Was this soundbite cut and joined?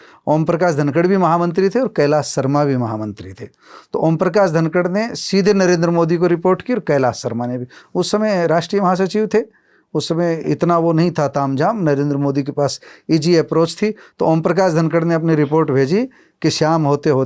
no; 0 cuts

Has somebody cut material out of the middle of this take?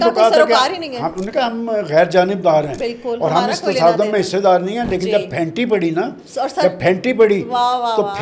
no; 0 cuts

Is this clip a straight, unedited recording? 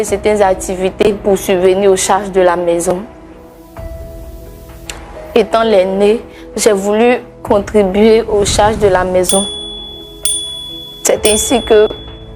yes; 0 cuts

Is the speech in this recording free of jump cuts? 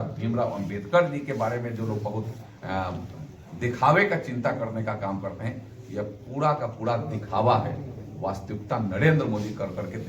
yes; 0 cuts

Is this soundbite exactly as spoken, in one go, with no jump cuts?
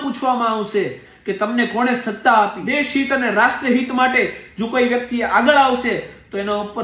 no; 1 cut; at 2.6 s

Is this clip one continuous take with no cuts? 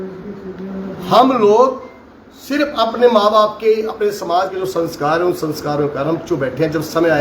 yes; 0 cuts

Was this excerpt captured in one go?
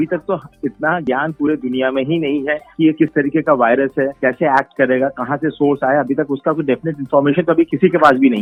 yes; 0 cuts

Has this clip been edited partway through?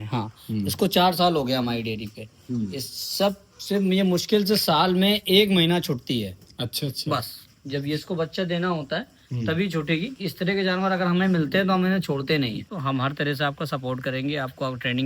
yes; 1 cut; at 12.7 s

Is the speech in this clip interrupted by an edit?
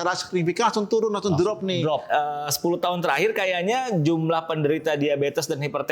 yes; 1 cut; at 2.0 s

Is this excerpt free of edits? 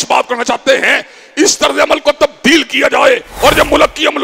no; 1 cut; at 3.3 s

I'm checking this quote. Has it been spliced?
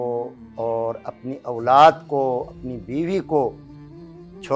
no; 0 cuts

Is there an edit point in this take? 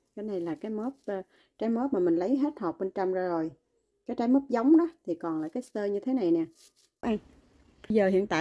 yes; 1 cut; at 7.0 s

